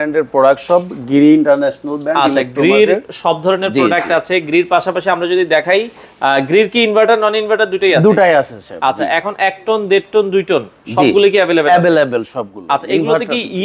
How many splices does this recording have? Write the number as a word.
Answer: zero